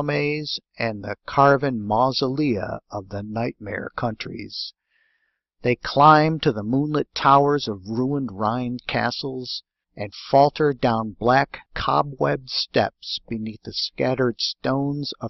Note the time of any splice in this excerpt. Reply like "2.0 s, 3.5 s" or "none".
13.5 s